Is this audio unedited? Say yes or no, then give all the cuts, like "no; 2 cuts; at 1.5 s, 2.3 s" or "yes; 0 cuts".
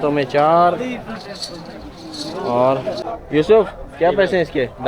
no; 1 cut; at 3.0 s